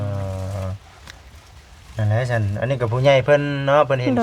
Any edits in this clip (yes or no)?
no